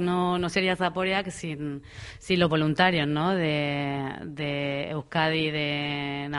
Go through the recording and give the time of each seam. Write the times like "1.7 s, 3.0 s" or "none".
none